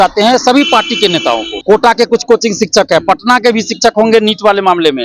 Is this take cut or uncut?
cut